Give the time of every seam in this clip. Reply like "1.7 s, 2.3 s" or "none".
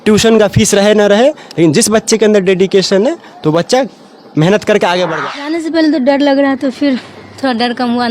5.1 s